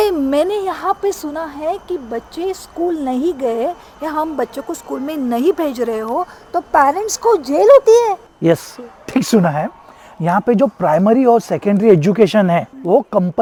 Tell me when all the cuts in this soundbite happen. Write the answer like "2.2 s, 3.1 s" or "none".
none